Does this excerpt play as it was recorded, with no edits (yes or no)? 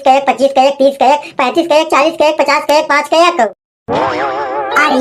no